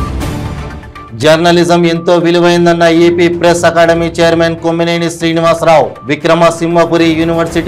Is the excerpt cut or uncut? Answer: uncut